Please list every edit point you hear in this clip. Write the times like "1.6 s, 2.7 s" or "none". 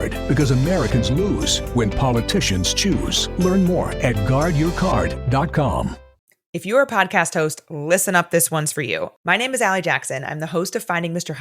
6.1 s